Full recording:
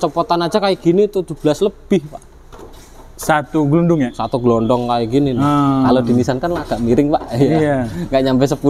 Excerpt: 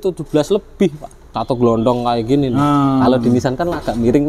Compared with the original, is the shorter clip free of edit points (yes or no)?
no